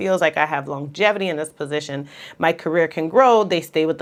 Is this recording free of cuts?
yes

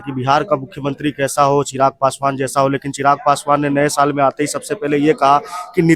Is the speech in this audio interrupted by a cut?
no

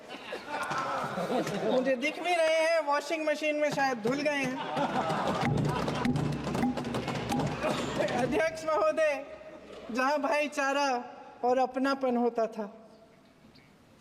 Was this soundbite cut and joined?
no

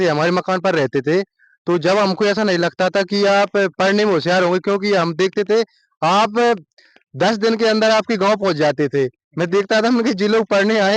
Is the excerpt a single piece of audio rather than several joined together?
yes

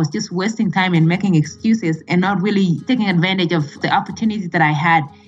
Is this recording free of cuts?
no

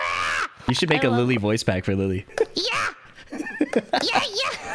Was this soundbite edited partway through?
yes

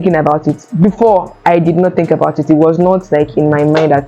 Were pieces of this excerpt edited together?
no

